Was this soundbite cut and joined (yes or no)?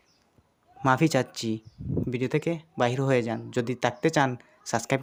no